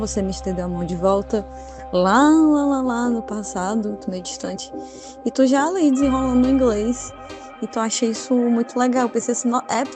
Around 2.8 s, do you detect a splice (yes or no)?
no